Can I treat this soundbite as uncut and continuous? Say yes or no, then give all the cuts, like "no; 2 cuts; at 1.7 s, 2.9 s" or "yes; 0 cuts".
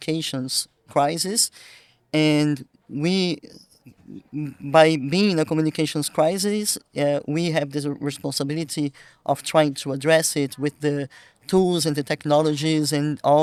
yes; 0 cuts